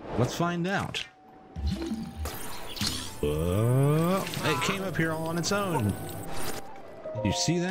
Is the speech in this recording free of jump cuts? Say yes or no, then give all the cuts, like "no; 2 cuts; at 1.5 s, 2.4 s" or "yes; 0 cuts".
yes; 0 cuts